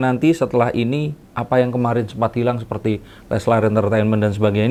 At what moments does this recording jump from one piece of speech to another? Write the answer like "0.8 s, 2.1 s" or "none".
none